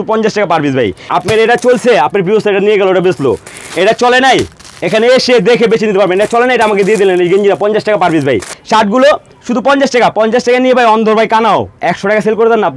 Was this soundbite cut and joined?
yes; 2 cuts; at 1.0 s, 8.5 s

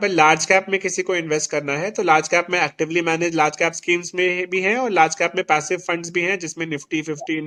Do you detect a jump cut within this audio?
no; 0 cuts

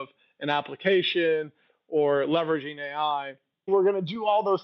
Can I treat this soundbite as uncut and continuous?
no; 1 cut; at 3.7 s

